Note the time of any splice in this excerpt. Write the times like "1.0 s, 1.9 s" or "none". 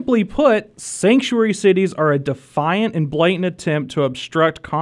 none